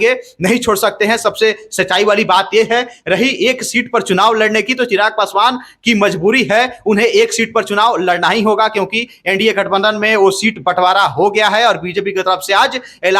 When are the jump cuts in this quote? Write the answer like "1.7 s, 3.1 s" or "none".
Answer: none